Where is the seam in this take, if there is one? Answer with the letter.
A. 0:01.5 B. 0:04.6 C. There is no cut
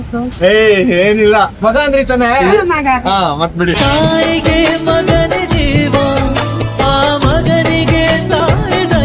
A